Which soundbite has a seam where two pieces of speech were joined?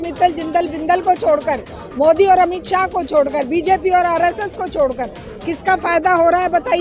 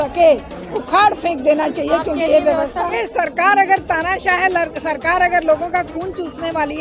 second; 1 cut; at 3.0 s

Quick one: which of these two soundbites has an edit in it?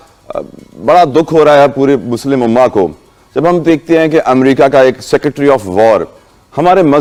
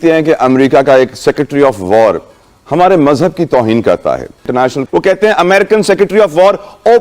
second; 1 cut; at 4.8 s

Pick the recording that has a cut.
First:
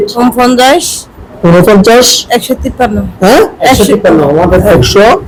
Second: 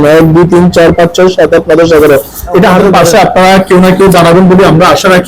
second; 1 cut; at 3.0 s

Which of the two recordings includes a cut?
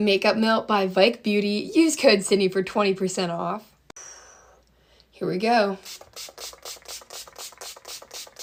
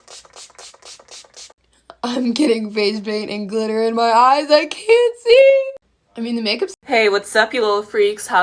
second; 1 cut; at 6.8 s

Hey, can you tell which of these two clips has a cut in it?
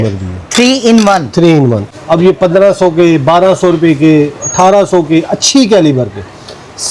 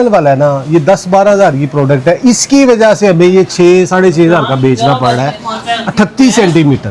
first; 1 cut; at 1.9 s

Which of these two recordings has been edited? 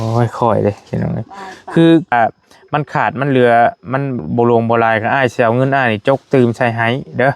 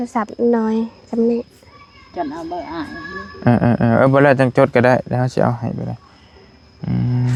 first; 1 cut; at 2.1 s

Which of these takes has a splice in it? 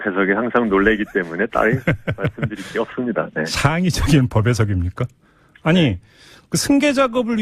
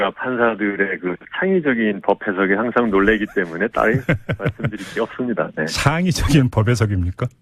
second; 1 cut; at 1.2 s

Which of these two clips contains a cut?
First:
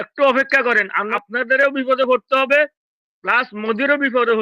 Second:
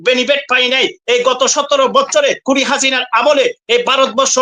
first; 1 cut; at 1.1 s

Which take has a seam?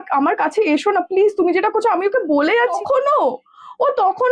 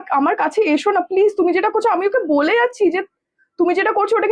first; 1 cut; at 2.7 s

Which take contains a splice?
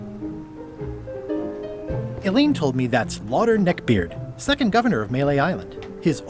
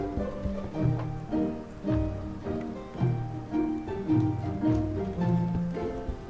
first; 1 cut; at 2.2 s

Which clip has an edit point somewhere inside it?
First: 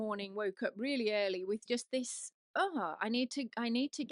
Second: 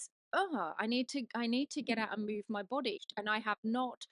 second; 1 cut; at 3.0 s

